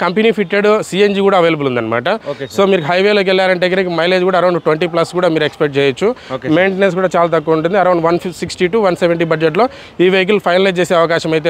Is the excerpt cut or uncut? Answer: uncut